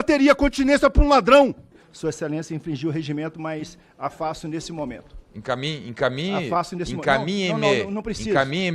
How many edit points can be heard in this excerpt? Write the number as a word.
one